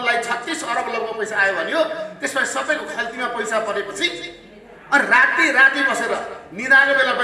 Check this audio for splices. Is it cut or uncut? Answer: uncut